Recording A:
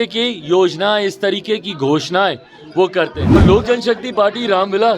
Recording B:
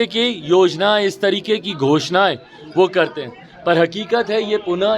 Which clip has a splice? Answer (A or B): A